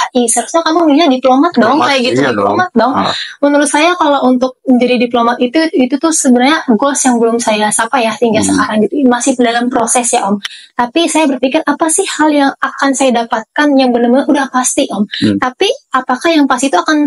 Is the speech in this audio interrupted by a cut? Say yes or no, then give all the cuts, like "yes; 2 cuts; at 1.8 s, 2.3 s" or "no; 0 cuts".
no; 0 cuts